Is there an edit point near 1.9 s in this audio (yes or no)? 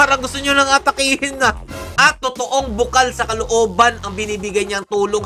yes